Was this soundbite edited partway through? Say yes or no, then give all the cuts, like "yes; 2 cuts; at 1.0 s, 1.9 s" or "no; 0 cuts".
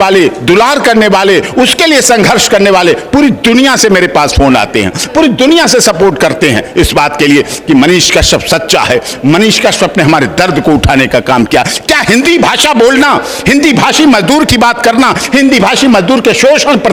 no; 0 cuts